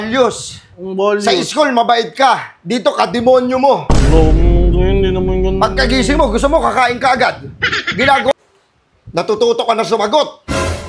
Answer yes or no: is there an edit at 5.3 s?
no